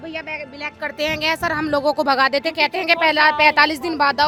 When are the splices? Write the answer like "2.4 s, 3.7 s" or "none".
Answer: none